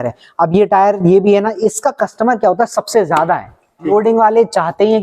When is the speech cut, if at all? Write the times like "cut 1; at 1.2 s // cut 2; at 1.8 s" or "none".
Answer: cut 1; at 3.9 s